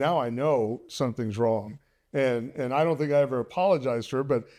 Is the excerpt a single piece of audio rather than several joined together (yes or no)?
yes